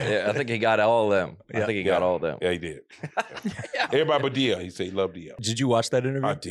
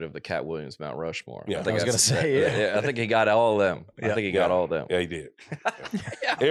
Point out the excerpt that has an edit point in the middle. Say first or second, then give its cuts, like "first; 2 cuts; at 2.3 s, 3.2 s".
first; 1 cut; at 5.4 s